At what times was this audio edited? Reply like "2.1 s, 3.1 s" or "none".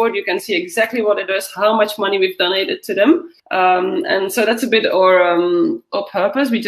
3.4 s